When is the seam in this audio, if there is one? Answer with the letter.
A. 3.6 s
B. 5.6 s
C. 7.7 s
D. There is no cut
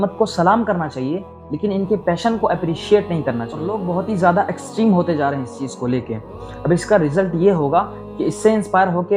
A